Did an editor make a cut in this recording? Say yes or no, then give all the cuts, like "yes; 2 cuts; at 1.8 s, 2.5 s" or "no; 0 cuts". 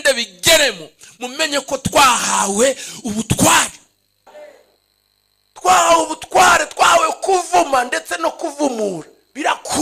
yes; 1 cut; at 4.3 s